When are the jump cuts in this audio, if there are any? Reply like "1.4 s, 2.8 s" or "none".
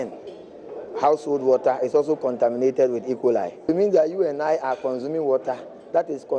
3.7 s